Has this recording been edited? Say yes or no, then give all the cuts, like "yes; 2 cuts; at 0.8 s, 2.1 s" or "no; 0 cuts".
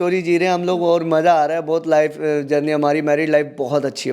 no; 0 cuts